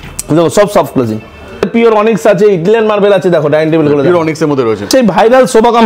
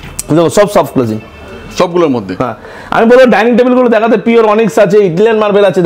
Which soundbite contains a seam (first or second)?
first